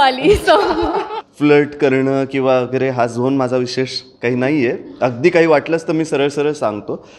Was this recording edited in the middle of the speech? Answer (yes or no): yes